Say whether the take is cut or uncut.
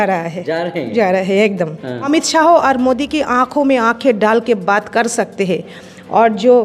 cut